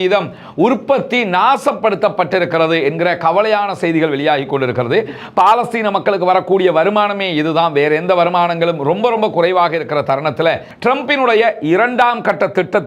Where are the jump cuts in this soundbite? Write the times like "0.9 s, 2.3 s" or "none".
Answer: 10.7 s